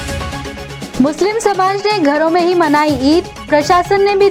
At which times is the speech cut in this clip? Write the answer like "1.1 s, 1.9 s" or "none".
none